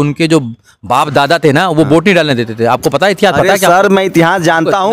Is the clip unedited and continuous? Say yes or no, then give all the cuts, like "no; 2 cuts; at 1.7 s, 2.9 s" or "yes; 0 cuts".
yes; 0 cuts